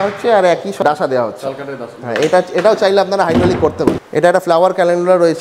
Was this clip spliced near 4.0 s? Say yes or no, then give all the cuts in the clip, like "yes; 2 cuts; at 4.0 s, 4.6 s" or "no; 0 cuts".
yes; 2 cuts; at 0.8 s, 4.0 s